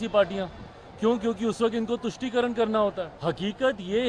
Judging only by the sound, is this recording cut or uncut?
cut